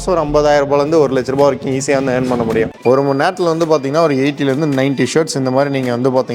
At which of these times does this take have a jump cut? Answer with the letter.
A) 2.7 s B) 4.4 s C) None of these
A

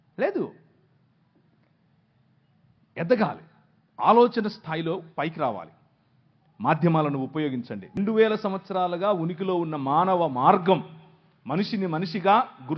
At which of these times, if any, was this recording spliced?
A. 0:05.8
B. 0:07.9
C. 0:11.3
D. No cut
B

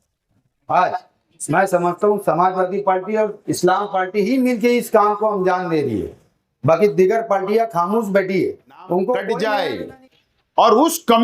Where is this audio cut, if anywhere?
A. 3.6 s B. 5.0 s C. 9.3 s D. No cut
C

